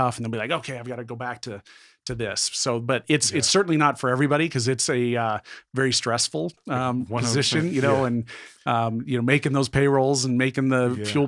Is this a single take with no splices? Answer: yes; 0 cuts

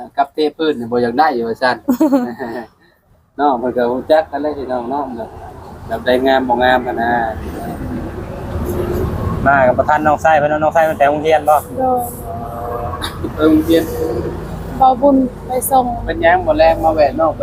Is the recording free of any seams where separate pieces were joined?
yes; 0 cuts

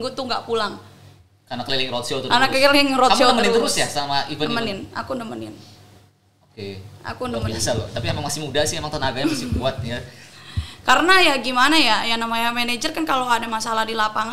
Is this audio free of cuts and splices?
yes; 0 cuts

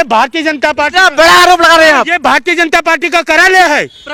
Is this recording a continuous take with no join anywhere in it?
yes; 0 cuts

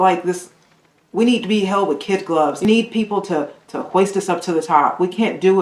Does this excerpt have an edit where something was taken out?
yes; 1 cut; at 2.6 s

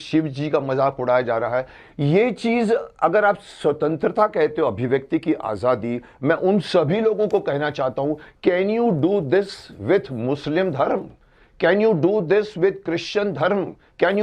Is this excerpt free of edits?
yes; 0 cuts

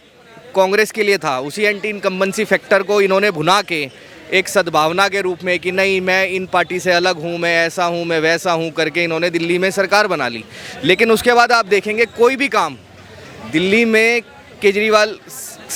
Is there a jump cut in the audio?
no; 0 cuts

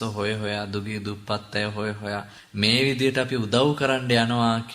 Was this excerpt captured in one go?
no; 1 cut; at 2.4 s

